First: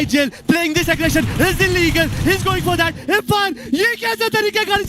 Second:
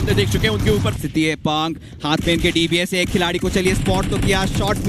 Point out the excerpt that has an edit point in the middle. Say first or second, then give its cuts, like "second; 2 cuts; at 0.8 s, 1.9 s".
second; 1 cut; at 1.0 s